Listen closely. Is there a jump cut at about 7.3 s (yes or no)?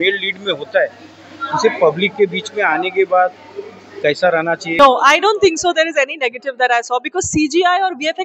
no